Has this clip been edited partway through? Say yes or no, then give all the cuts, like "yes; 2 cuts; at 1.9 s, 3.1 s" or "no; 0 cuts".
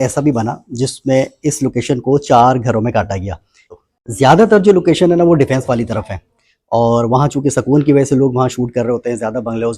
yes; 1 cut; at 3.7 s